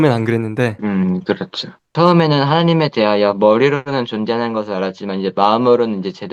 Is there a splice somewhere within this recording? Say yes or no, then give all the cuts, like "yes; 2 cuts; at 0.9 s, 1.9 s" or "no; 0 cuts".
yes; 2 cuts; at 0.8 s, 1.8 s